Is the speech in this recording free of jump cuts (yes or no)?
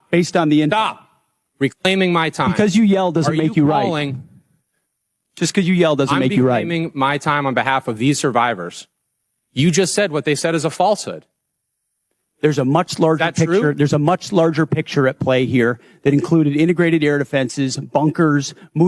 no